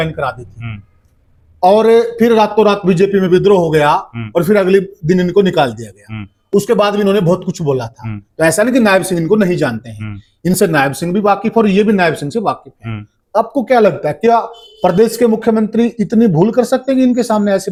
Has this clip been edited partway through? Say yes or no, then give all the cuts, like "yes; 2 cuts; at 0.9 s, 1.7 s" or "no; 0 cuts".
no; 0 cuts